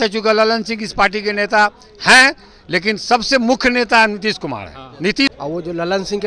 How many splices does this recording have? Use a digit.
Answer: 1